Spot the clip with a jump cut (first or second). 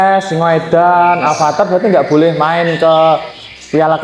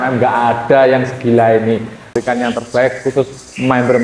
second